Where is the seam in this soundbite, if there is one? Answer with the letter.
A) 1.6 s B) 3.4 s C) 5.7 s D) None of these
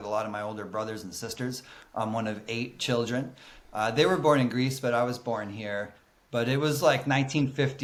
D